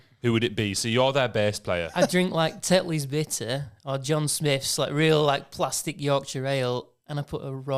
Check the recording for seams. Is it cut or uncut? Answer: cut